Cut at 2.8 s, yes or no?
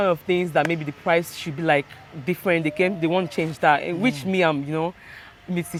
no